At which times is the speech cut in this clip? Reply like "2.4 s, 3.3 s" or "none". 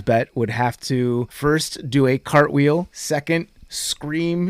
1.3 s, 3.0 s